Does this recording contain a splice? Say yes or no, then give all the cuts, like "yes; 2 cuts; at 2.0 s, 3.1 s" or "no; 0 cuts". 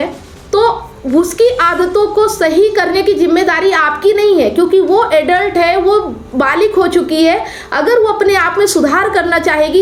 no; 0 cuts